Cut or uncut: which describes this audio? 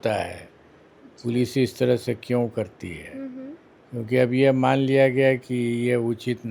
uncut